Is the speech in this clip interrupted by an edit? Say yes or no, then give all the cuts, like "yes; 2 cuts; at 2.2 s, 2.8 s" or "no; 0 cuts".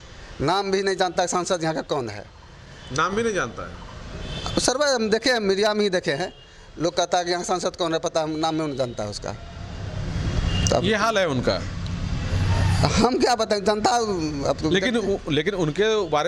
no; 0 cuts